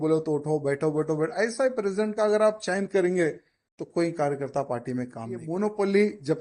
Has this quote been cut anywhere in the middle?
yes; 1 cut; at 5.5 s

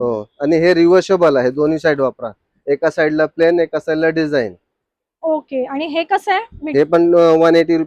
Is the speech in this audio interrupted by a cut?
no; 0 cuts

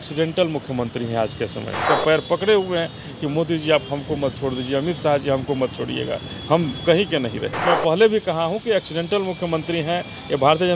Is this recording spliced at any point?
yes; 2 cuts; at 1.8 s, 7.6 s

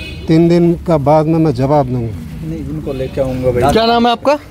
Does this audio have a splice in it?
no; 0 cuts

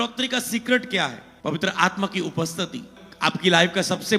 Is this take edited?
yes; 2 cuts; at 1.3 s, 3.0 s

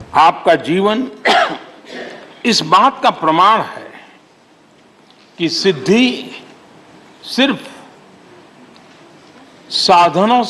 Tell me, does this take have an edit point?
no; 0 cuts

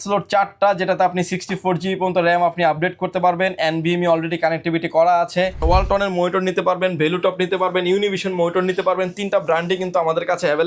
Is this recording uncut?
no; 1 cut; at 5.6 s

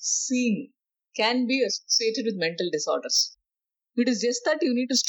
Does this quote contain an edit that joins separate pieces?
yes; 1 cut; at 3.3 s

